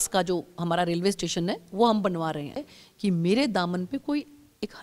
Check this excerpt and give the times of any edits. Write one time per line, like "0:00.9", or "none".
0:02.7